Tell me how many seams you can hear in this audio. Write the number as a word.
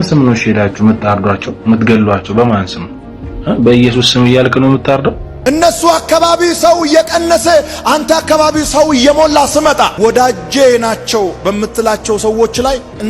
one